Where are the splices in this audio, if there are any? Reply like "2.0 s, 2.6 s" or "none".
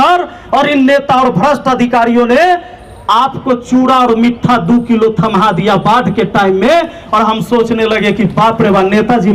none